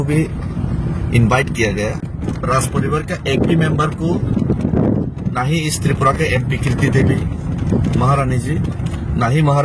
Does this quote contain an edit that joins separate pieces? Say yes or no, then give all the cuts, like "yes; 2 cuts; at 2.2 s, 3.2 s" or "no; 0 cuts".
yes; 1 cut; at 2.0 s